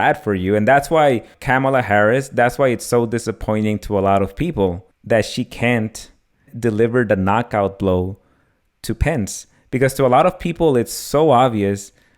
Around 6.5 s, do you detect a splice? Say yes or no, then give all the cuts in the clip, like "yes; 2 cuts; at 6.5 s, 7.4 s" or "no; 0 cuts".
yes; 3 cuts; at 1.3 s, 4.9 s, 6.5 s